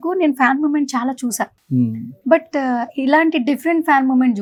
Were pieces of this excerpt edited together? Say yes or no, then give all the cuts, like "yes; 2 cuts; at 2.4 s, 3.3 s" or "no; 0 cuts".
no; 0 cuts